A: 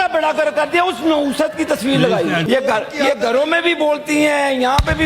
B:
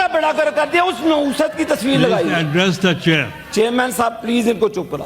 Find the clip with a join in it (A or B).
A